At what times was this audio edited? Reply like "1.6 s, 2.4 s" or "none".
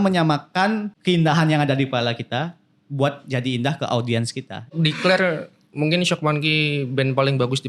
0.9 s, 4.7 s